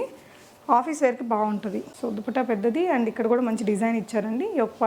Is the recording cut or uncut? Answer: uncut